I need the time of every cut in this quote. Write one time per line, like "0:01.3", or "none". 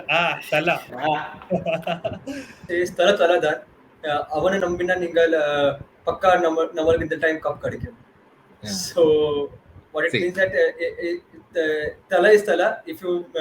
0:02.6